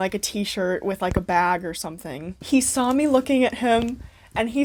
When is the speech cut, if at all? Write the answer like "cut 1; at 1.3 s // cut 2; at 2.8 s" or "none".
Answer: none